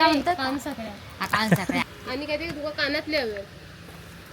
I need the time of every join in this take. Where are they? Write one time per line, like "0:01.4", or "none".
0:01.8